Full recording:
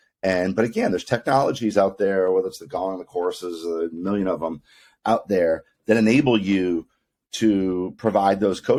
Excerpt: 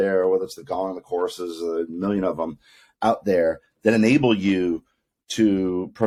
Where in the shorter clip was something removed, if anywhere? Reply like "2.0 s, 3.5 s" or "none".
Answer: none